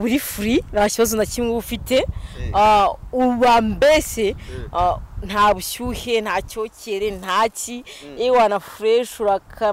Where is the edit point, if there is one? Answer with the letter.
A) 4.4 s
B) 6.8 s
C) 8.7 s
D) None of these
D